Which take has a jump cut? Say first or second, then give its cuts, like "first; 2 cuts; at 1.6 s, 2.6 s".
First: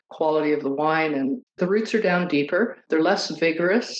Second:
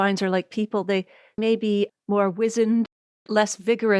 first; 2 cuts; at 1.4 s, 2.8 s